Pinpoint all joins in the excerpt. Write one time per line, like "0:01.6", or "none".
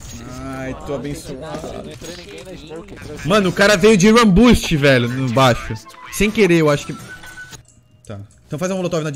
0:03.0
0:07.4